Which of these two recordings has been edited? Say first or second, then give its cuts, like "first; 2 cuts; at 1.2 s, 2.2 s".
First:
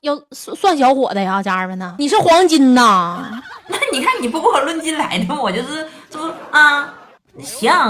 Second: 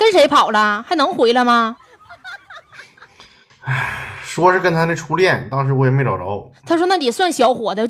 first; 1 cut; at 1.8 s